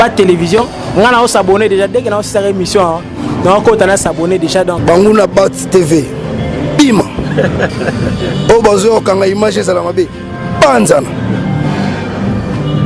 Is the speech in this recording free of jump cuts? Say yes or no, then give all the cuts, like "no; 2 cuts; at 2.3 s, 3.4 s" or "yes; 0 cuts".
yes; 0 cuts